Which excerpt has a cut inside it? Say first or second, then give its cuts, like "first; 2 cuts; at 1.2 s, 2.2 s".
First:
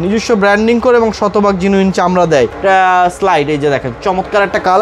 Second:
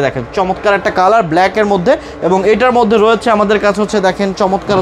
first; 1 cut; at 2.7 s